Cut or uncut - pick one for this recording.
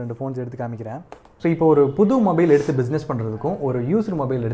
cut